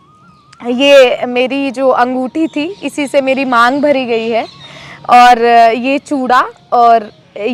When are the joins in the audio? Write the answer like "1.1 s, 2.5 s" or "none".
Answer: none